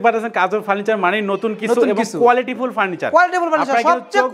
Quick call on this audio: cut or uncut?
uncut